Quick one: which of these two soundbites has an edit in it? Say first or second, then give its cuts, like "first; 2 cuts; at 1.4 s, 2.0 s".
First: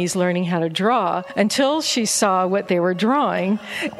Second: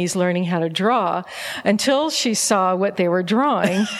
first; 1 cut; at 1.3 s